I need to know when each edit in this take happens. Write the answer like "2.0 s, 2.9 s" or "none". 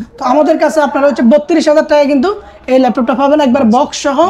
none